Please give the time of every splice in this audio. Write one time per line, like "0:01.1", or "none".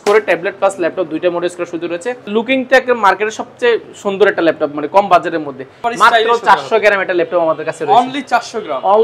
0:02.3
0:05.8